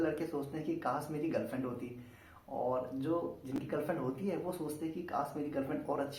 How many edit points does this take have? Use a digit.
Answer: 0